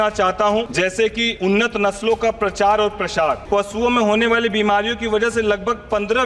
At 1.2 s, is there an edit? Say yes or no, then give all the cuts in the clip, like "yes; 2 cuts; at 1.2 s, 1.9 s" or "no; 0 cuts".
yes; 2 cuts; at 1.2 s, 3.4 s